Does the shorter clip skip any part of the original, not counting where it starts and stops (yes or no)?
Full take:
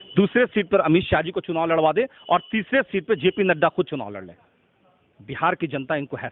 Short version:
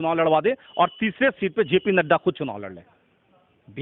no